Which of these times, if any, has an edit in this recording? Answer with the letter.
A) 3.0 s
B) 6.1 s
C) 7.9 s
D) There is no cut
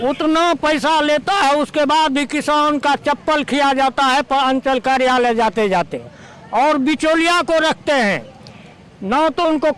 D